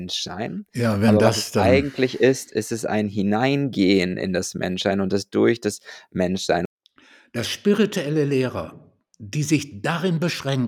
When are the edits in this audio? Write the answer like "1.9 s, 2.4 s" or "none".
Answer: 6.7 s